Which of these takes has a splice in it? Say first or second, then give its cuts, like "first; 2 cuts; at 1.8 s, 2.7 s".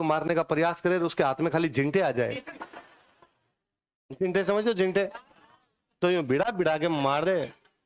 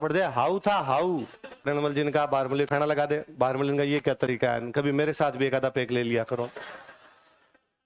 second; 1 cut; at 1.7 s